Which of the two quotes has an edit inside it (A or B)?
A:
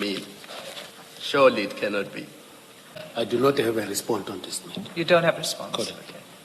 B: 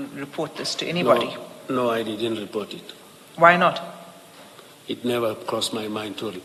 A